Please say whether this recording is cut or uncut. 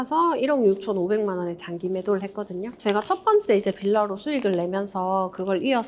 uncut